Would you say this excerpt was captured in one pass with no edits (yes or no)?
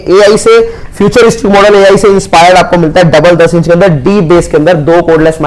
yes